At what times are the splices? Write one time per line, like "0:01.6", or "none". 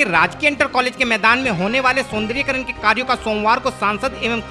none